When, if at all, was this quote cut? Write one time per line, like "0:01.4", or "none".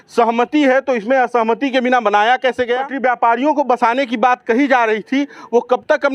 0:02.9